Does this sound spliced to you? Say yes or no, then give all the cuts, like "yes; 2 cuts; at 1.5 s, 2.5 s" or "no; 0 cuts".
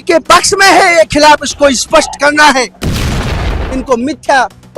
yes; 1 cut; at 3.2 s